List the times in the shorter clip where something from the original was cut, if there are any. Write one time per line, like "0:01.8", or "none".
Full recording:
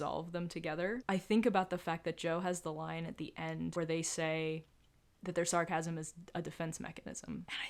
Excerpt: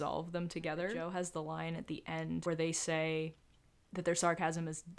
0:01.0